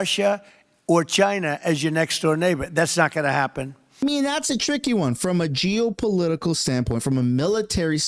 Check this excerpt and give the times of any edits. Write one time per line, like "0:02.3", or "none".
none